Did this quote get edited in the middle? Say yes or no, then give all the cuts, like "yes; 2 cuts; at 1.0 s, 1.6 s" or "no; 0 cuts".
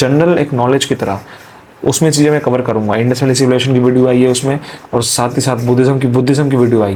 no; 0 cuts